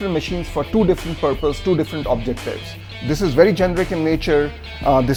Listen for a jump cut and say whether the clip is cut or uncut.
uncut